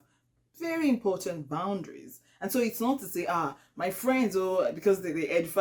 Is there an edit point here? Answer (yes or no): no